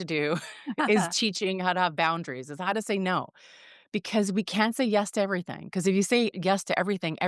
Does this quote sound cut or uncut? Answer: cut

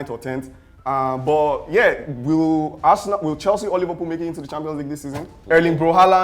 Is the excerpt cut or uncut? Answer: cut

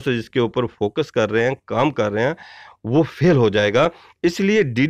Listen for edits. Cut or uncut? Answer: uncut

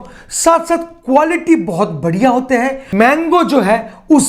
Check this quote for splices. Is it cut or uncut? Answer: cut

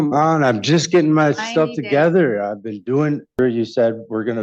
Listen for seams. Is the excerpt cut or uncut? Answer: cut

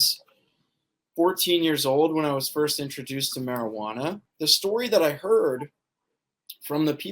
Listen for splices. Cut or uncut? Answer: cut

